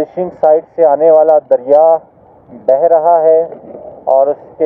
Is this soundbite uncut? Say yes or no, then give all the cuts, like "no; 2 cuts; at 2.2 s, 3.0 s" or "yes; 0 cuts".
yes; 0 cuts